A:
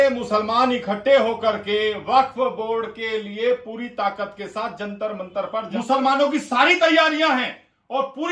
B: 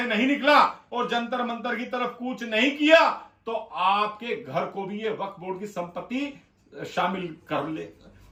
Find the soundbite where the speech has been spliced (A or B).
A